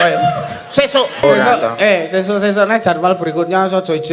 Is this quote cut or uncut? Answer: cut